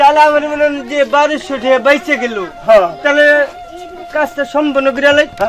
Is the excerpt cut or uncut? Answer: uncut